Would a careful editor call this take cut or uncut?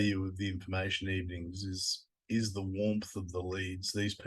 uncut